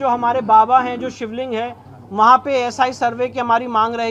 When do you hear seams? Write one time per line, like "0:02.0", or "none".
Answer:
none